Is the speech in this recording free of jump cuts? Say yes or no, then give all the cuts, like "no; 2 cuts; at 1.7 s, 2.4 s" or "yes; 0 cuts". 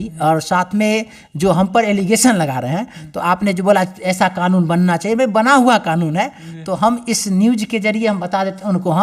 yes; 0 cuts